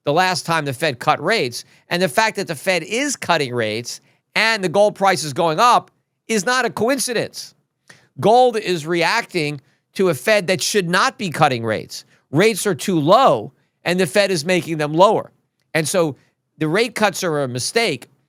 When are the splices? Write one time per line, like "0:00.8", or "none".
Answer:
none